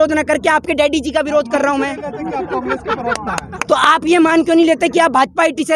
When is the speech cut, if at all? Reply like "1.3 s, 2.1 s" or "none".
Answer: none